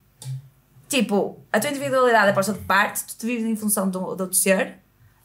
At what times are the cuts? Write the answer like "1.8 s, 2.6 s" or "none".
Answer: none